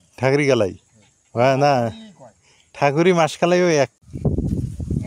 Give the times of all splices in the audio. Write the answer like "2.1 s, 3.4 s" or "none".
3.9 s